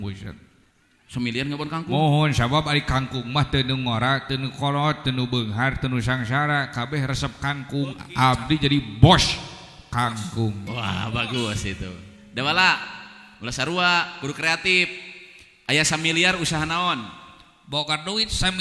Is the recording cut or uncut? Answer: uncut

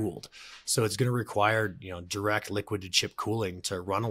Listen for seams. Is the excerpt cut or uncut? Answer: uncut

